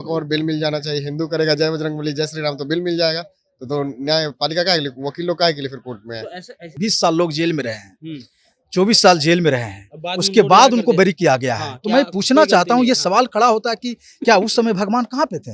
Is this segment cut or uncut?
cut